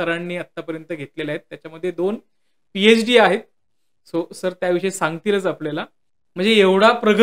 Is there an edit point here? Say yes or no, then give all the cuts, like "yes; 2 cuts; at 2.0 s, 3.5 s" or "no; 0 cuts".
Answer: no; 0 cuts